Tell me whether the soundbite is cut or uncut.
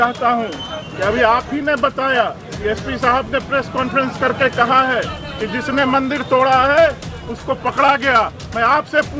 uncut